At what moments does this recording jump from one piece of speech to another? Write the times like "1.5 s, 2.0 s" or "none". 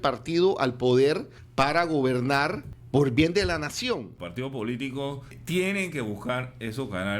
1.4 s, 2.7 s, 4.1 s, 5.4 s